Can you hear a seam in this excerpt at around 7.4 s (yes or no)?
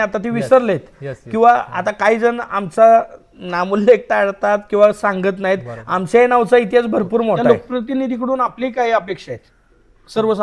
yes